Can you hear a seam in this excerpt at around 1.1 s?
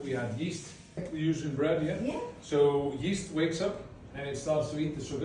yes; 1 cut; at 1.1 s

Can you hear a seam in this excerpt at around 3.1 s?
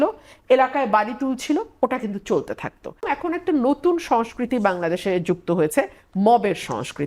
yes; 1 cut; at 3.1 s

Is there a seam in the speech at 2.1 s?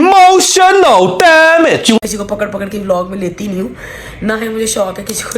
yes; 1 cut; at 2.1 s

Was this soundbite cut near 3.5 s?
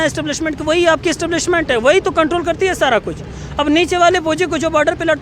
no; 0 cuts

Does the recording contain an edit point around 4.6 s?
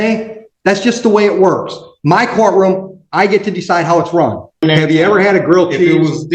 yes; 1 cut; at 4.6 s

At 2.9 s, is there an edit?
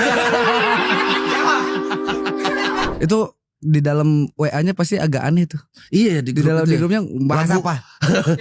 yes; 1 cut; at 2.9 s

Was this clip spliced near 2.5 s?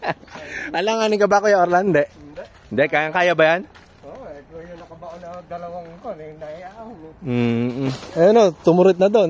no; 1 cut; at 8.0 s

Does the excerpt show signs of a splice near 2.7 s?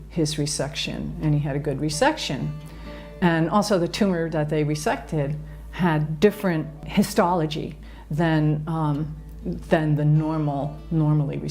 no; 1 cut; at 6.8 s

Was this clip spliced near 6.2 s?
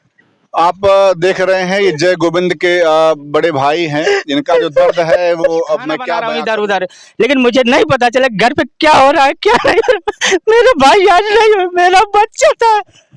yes; 1 cut; at 6.2 s

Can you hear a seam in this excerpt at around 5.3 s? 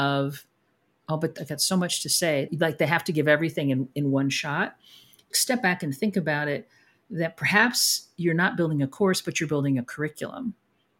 yes; 3 cuts; at 1.3 s, 2.5 s, 5.3 s

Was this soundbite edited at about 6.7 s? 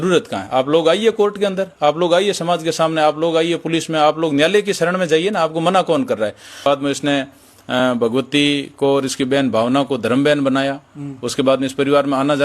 yes; 1 cut; at 6.7 s

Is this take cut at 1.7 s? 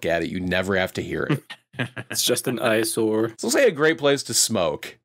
no; 1 cut; at 3.4 s

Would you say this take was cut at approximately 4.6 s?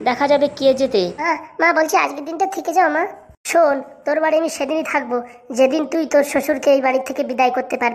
no; 1 cut; at 1.3 s

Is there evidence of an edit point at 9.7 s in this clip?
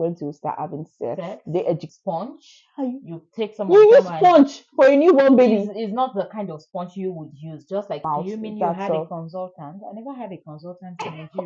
no; 2 cuts; at 1.9 s, 8.0 s

